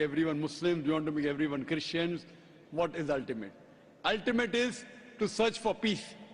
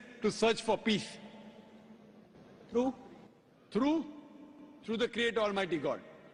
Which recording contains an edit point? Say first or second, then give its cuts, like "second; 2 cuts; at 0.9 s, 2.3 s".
first; 1 cut; at 3.7 s